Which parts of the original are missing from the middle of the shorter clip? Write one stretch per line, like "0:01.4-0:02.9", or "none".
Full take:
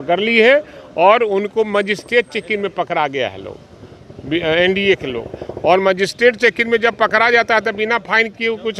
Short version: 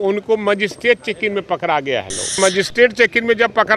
0:03.7-0:05.8